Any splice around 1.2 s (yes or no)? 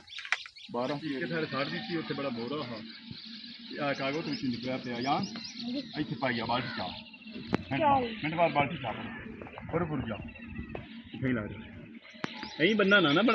yes